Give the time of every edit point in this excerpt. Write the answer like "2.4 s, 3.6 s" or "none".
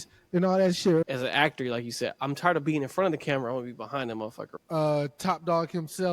1.0 s, 4.5 s